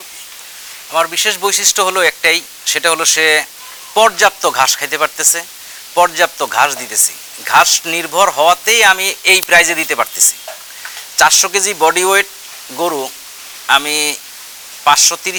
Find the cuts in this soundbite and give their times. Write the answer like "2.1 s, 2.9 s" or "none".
none